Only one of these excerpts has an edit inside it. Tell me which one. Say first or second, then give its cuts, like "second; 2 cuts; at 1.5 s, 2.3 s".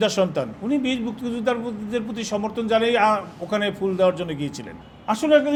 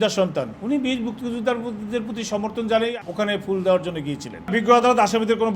second; 2 cuts; at 2.9 s, 4.3 s